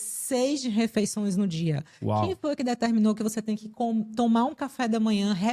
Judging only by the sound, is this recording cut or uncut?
uncut